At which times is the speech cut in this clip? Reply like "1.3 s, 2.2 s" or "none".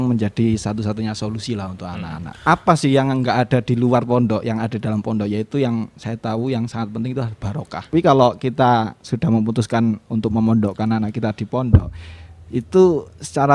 2.2 s, 7.9 s